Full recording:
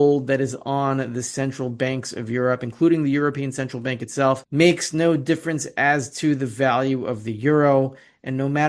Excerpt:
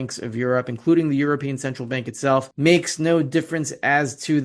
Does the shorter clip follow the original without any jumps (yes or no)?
yes